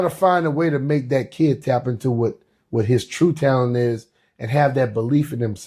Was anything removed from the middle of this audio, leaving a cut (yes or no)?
no